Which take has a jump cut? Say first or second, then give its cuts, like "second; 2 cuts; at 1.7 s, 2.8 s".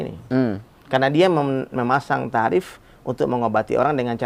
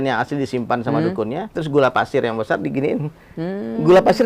second; 1 cut; at 1.5 s